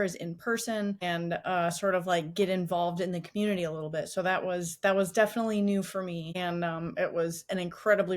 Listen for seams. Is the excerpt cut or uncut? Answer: cut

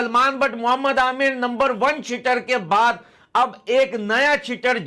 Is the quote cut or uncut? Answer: uncut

